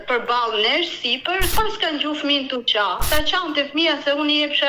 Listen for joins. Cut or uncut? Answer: cut